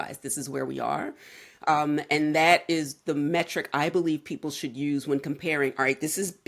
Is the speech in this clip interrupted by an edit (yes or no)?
no